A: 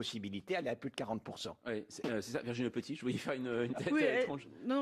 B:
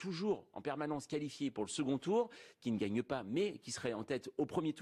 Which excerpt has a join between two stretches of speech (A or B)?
A